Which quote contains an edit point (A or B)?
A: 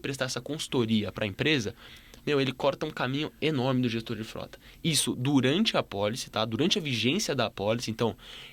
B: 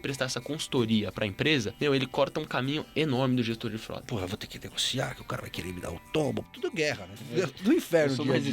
B